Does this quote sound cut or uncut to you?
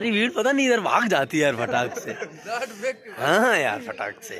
uncut